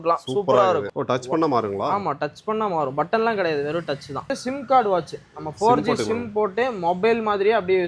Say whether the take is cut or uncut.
cut